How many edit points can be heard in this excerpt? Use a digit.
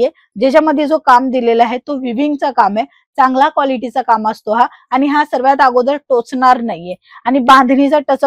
0